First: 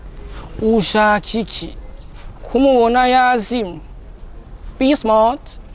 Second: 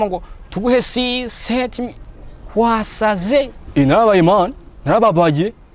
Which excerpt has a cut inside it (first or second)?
second